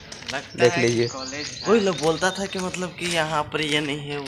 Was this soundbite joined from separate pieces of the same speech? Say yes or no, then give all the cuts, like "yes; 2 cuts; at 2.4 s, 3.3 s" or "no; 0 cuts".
no; 0 cuts